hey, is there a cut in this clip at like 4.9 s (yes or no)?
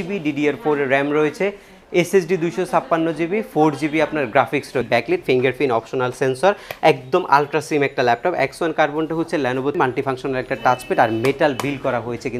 yes